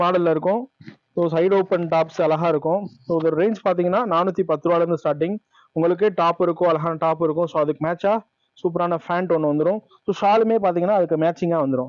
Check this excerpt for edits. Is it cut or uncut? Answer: uncut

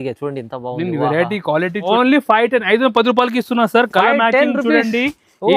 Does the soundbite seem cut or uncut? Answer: cut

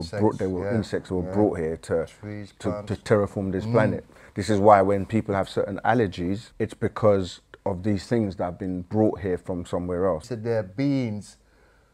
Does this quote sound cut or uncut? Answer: cut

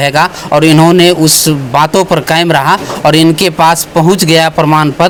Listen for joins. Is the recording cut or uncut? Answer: uncut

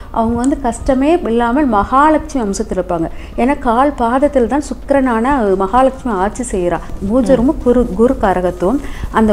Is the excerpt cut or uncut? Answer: cut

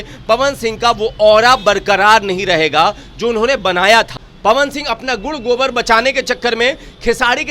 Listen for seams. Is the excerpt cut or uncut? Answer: cut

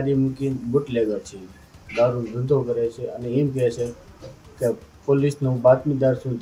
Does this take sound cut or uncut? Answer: uncut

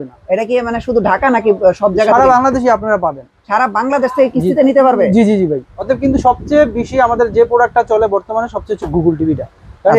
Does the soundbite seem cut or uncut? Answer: cut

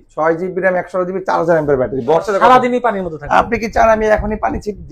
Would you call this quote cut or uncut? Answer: cut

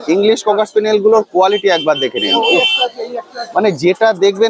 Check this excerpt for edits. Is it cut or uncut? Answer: uncut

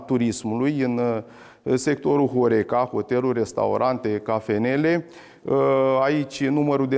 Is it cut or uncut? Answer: uncut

